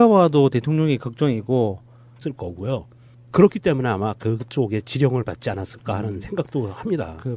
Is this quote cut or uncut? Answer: uncut